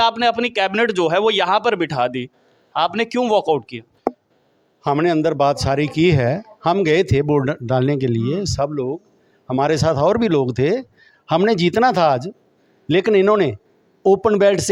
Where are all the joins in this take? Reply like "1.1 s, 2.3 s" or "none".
none